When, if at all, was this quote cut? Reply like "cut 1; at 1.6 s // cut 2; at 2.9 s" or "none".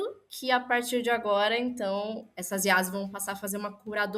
cut 1; at 2.3 s